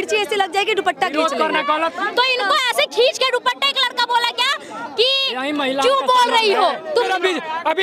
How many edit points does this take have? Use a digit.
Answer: 2